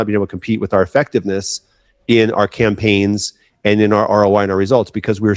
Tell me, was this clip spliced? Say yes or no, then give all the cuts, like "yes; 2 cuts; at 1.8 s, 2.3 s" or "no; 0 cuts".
no; 0 cuts